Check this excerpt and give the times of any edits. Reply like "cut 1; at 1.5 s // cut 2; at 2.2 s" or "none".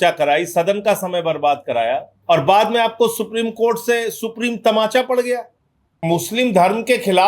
cut 1; at 2.1 s // cut 2; at 5.9 s